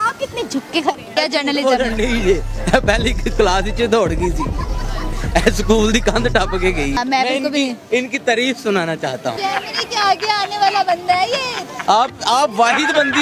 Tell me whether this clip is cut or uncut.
cut